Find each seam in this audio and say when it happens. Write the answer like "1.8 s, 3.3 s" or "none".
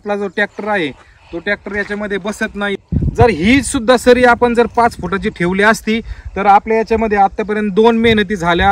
2.8 s